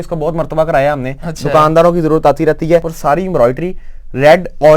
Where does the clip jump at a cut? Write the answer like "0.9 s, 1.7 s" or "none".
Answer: 2.9 s